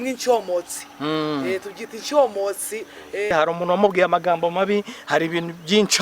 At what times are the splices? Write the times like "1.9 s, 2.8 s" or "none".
3.3 s